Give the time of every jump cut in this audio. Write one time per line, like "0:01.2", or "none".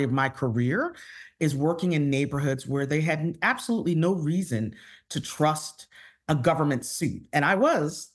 none